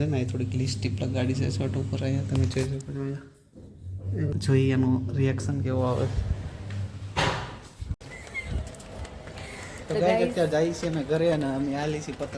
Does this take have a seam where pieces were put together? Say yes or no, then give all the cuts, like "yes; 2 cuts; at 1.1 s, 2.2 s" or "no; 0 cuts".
yes; 2 cuts; at 4.3 s, 8.0 s